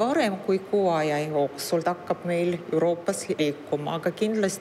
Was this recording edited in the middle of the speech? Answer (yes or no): yes